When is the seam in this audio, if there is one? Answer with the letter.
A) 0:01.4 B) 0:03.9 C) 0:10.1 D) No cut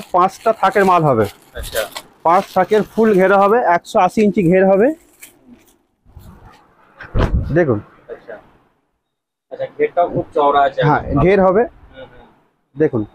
D